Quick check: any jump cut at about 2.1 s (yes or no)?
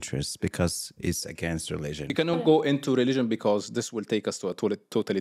yes